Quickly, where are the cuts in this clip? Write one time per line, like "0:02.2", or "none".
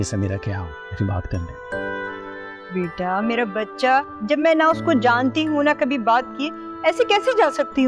none